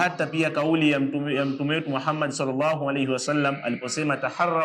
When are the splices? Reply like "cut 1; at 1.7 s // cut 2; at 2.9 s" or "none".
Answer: none